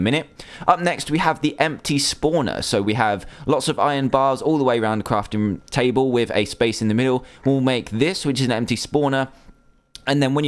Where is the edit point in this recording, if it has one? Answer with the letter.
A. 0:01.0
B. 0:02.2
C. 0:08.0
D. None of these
D